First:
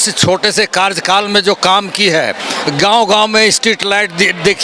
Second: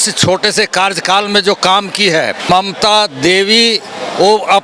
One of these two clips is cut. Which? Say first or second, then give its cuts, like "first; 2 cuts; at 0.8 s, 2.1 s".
second; 1 cut; at 2.5 s